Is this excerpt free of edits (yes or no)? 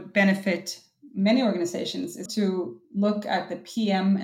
no